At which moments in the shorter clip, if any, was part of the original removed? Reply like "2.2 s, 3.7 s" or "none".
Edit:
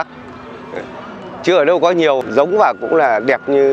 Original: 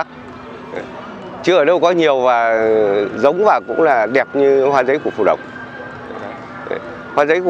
2.2 s